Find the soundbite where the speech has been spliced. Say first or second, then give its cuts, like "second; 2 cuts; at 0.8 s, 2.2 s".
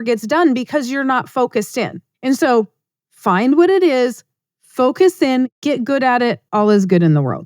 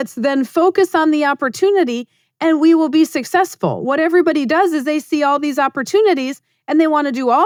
first; 2 cuts; at 2.1 s, 6.4 s